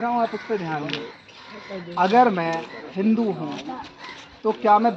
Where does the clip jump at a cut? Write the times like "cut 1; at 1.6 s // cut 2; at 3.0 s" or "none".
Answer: none